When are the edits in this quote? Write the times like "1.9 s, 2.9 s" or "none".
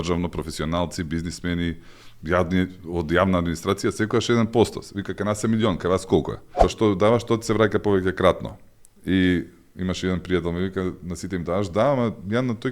6.6 s

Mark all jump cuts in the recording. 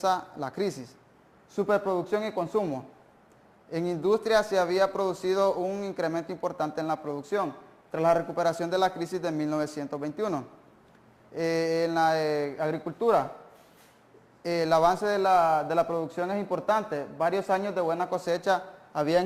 15.4 s

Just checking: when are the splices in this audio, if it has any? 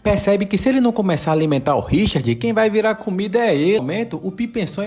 3.8 s

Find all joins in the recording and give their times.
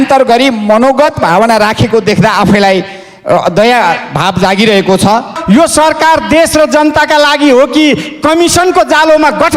5.3 s

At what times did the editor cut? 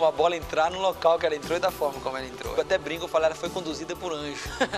2.5 s

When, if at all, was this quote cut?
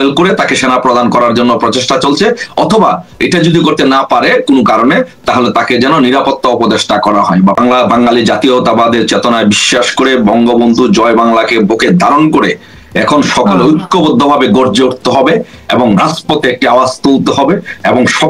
7.6 s

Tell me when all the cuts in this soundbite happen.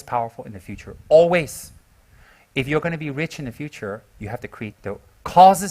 4.8 s

